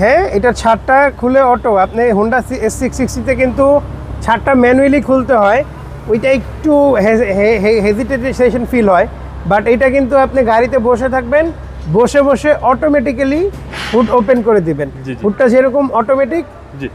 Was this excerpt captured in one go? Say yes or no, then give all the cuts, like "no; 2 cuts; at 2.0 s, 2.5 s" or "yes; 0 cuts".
yes; 0 cuts